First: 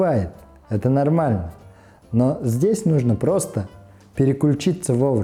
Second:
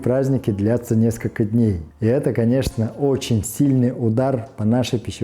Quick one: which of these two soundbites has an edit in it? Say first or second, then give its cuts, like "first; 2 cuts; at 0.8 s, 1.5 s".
second; 1 cut; at 1.9 s